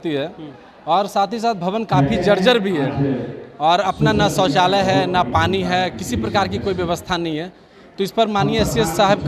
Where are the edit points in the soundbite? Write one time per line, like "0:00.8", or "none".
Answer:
none